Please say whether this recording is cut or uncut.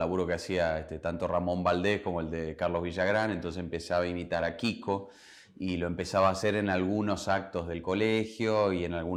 uncut